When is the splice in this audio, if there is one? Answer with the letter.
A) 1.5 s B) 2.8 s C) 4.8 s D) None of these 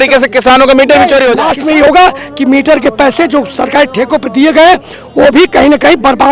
A